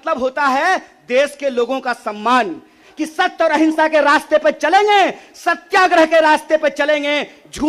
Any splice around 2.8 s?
yes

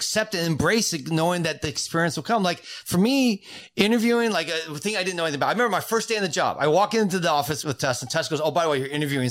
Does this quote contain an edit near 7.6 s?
yes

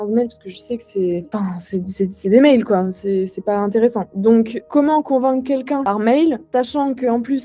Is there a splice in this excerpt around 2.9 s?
no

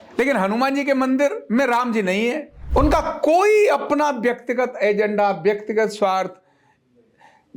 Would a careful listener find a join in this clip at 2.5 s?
yes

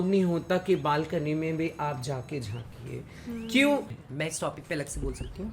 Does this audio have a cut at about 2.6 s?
no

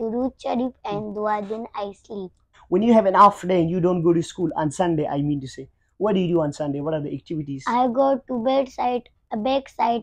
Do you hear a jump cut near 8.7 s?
no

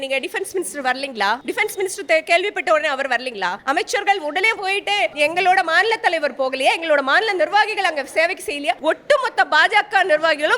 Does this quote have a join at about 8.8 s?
yes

